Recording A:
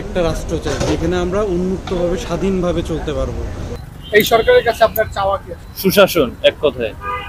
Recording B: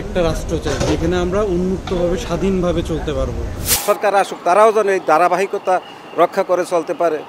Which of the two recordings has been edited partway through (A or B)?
B